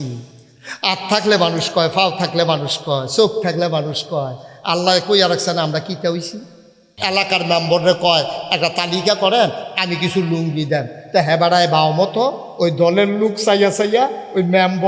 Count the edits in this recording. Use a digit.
1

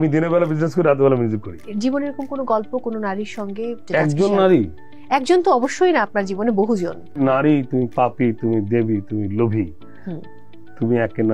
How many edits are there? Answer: 3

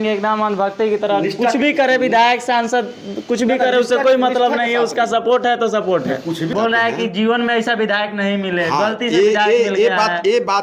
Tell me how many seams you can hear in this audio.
1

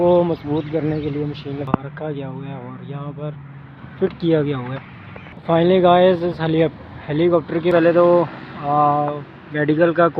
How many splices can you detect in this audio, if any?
2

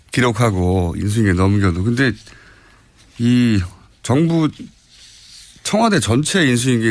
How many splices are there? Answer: 0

